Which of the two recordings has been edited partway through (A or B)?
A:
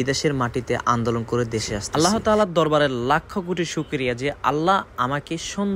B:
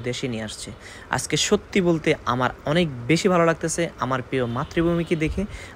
A